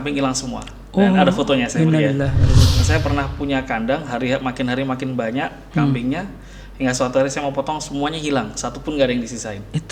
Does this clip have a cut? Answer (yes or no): yes